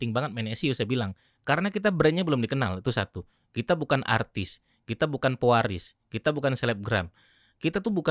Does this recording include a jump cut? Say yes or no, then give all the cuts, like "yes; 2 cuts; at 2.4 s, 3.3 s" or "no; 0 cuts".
no; 0 cuts